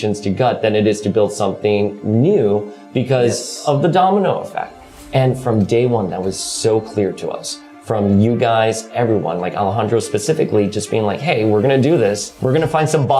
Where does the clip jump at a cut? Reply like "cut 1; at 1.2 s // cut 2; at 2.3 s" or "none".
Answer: cut 1; at 12.3 s